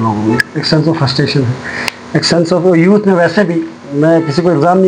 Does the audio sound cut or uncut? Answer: uncut